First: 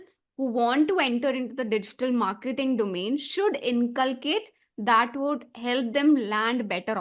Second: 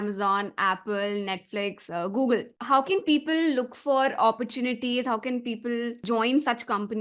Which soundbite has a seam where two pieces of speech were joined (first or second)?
second